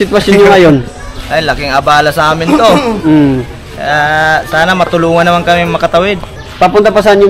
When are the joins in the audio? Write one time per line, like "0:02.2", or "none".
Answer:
0:06.3